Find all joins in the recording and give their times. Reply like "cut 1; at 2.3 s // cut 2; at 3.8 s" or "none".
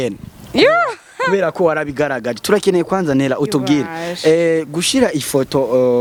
none